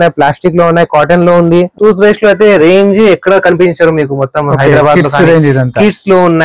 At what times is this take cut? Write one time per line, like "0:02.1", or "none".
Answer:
0:01.7